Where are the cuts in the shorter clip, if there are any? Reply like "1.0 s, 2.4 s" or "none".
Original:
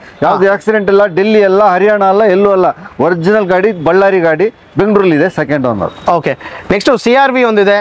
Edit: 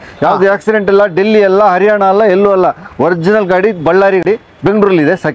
4.2 s